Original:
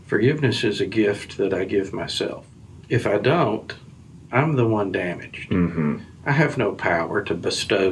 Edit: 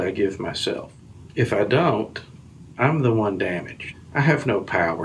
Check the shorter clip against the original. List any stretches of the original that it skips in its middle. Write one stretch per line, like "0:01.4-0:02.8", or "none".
0:05.4-0:06.0